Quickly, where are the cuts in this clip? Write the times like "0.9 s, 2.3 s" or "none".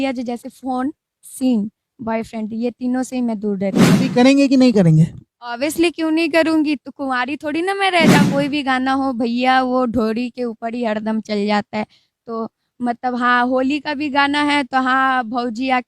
3.9 s, 8.2 s